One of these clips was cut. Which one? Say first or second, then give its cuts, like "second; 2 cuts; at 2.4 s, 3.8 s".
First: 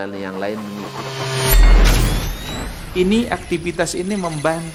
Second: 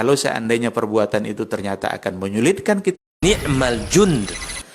second; 1 cut; at 3.1 s